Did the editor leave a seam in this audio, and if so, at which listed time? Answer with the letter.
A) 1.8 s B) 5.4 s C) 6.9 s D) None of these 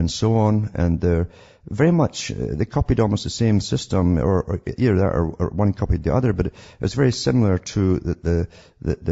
D